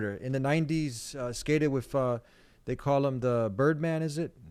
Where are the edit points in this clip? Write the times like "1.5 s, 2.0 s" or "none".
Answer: none

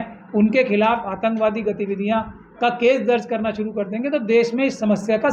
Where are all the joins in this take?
none

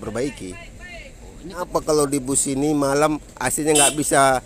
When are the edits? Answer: 1.6 s

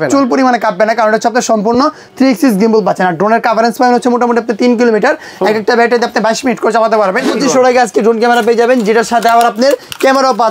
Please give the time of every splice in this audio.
7.3 s

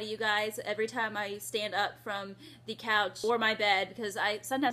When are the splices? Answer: 3.2 s

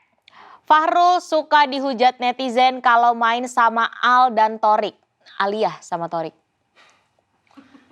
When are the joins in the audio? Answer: none

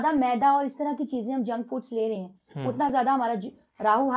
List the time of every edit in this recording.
none

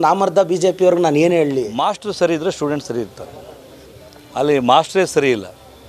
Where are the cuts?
1.7 s

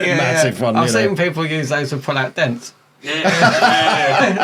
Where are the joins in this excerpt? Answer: none

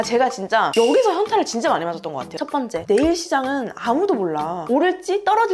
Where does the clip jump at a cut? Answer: 2.4 s

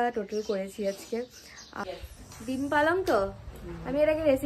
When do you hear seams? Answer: 1.7 s

